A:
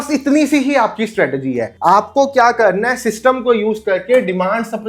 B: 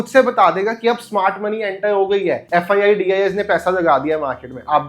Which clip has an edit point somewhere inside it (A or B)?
B